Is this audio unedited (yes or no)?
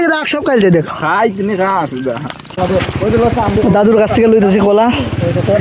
no